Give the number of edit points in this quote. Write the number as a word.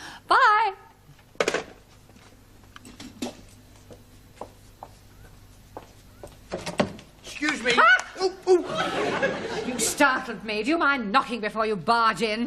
zero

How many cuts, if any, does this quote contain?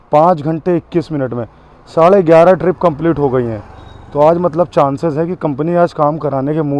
zero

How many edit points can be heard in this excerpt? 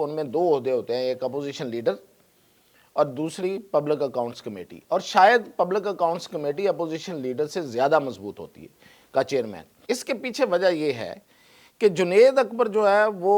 one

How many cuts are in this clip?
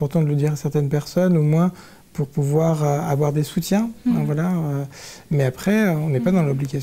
zero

